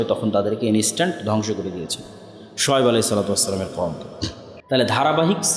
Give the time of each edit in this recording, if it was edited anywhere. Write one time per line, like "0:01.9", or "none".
0:04.5